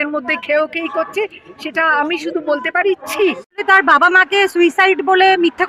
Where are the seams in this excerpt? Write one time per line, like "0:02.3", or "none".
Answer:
0:03.6